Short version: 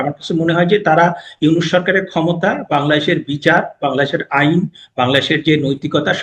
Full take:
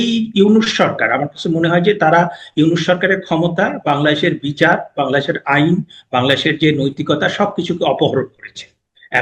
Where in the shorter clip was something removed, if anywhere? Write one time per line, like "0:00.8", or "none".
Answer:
none